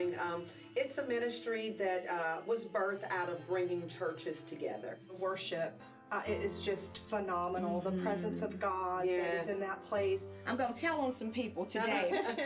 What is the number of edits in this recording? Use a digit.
2